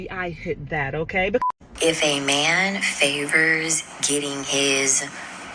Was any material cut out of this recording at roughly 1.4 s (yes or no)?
yes